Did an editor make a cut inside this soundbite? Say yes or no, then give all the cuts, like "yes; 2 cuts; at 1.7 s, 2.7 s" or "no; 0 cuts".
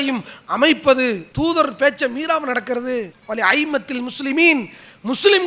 yes; 2 cuts; at 1.3 s, 3.2 s